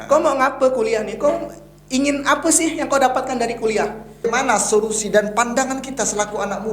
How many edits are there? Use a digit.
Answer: 1